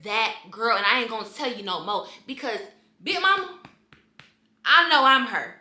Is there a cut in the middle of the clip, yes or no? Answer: no